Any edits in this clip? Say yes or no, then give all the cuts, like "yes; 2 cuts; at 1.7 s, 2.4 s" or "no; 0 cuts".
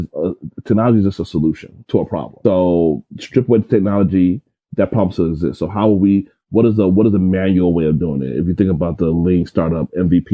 yes; 1 cut; at 2.1 s